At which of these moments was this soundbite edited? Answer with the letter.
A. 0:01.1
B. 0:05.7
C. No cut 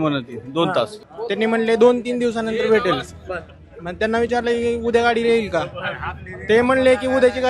A